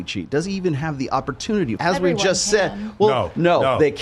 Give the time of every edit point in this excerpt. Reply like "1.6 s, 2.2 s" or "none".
1.8 s